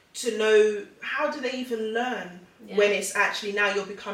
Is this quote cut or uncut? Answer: uncut